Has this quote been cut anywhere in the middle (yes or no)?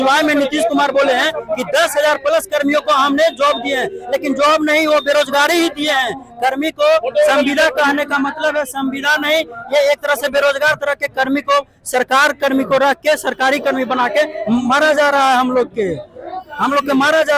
no